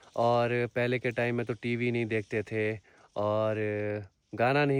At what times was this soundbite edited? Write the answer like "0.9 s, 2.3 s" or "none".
none